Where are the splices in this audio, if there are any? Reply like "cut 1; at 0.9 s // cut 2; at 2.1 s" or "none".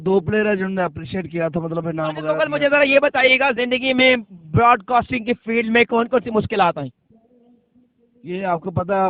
cut 1; at 2.3 s